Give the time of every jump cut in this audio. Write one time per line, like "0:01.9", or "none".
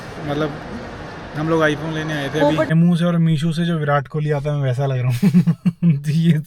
0:02.7